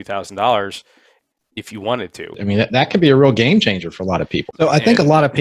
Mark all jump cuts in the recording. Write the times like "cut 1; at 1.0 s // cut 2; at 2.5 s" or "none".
cut 1; at 2.3 s // cut 2; at 4.4 s